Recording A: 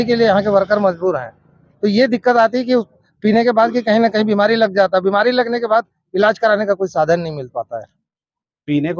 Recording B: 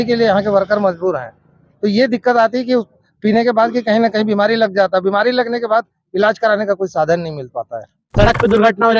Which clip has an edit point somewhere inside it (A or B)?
B